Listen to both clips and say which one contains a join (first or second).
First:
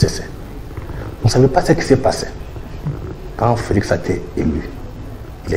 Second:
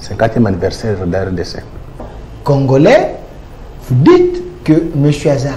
second